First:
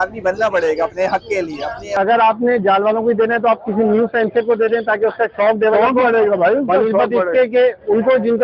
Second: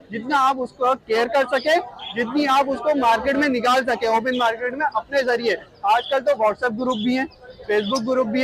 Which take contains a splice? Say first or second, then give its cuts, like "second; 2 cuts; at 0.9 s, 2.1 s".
first; 1 cut; at 2.0 s